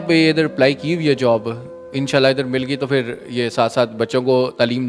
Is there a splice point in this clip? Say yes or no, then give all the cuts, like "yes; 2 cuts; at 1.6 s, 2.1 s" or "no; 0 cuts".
no; 0 cuts